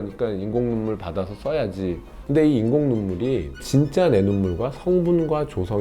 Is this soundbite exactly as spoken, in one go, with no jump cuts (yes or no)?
no